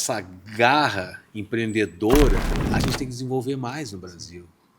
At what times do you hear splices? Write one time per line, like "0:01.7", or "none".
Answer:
0:02.6